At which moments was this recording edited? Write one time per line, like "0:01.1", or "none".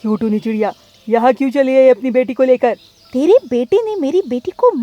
0:02.9